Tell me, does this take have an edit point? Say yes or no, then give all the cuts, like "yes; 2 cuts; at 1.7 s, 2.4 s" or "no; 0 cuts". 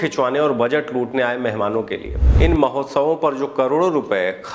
yes; 1 cut; at 2.2 s